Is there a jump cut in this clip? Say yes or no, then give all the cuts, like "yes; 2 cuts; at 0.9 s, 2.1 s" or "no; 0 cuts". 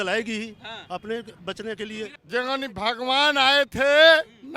yes; 1 cut; at 2.2 s